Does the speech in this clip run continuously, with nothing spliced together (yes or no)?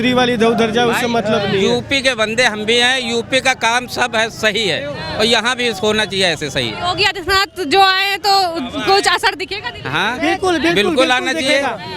yes